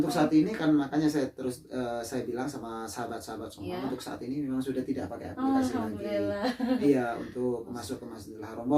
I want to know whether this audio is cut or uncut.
uncut